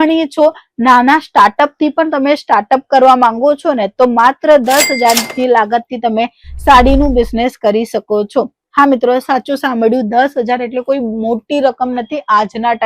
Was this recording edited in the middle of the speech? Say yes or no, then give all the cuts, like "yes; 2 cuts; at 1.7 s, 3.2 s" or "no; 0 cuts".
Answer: no; 0 cuts